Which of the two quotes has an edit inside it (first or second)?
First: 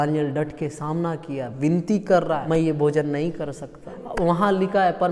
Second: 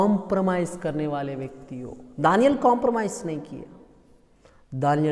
first